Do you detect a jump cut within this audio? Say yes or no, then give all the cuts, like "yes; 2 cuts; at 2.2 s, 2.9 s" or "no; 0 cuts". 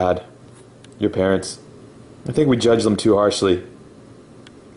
yes; 1 cut; at 3.1 s